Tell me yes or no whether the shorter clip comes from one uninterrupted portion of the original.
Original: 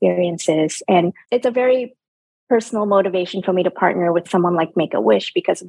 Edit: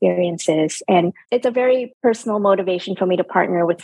no